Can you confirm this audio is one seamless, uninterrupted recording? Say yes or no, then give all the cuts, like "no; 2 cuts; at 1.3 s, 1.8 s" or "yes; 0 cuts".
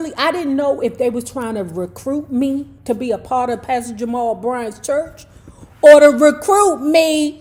yes; 0 cuts